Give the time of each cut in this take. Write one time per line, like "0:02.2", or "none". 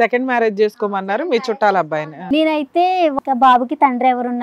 0:02.2
0:03.1